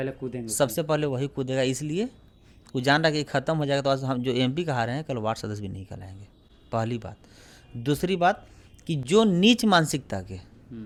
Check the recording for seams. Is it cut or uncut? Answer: uncut